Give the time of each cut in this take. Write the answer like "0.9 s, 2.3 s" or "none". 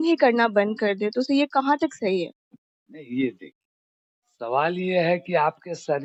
none